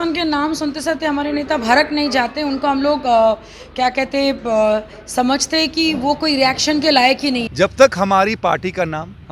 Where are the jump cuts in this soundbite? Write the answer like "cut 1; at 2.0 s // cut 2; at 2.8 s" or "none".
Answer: cut 1; at 7.5 s